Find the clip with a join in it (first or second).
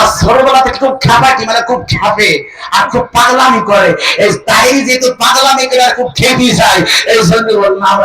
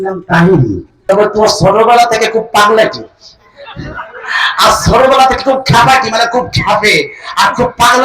second